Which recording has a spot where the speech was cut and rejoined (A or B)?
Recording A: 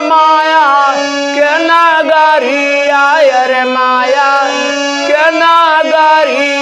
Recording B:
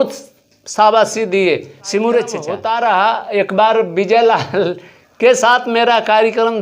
B